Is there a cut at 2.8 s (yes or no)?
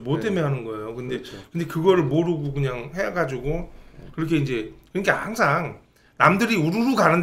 no